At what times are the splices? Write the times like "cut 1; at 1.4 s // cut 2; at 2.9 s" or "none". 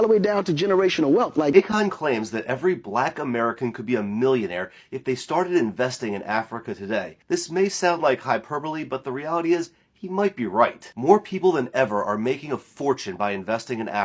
cut 1; at 1.5 s